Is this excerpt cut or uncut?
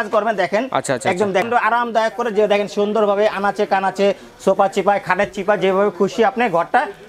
cut